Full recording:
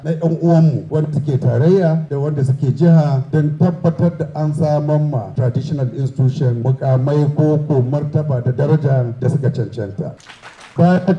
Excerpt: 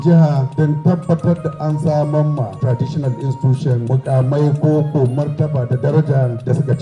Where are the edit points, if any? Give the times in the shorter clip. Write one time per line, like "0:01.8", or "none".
none